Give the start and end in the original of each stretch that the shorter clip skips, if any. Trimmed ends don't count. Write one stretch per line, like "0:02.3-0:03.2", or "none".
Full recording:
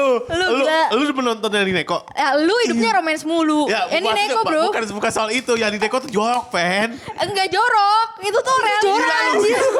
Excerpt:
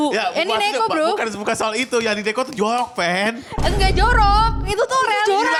none